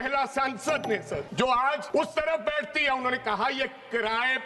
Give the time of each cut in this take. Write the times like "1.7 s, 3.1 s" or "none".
1.3 s, 1.8 s